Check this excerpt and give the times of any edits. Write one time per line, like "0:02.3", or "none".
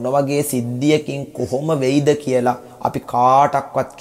0:02.7